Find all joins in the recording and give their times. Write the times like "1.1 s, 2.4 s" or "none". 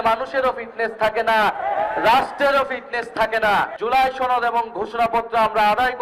3.7 s